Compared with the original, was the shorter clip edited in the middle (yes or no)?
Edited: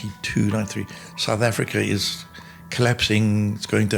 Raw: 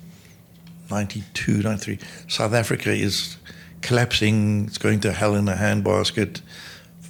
no